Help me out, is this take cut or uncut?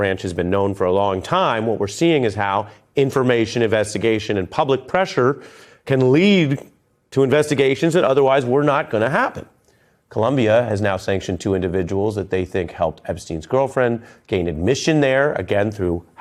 uncut